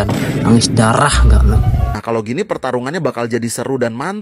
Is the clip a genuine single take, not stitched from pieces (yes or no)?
no